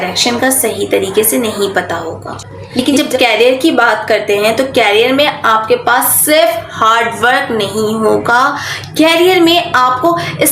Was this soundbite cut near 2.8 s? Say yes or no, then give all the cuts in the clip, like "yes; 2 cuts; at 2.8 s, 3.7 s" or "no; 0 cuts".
yes; 1 cut; at 2.8 s